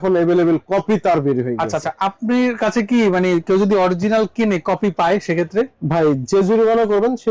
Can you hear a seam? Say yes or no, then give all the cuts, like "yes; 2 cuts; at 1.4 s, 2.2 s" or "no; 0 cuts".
no; 0 cuts